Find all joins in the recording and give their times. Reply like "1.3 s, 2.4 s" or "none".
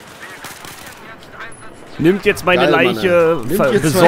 none